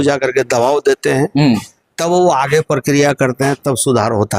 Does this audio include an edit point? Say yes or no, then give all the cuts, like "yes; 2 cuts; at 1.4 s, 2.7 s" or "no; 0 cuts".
no; 0 cuts